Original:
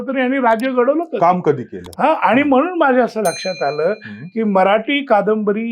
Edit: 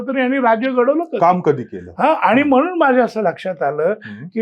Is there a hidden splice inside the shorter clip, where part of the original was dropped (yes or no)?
no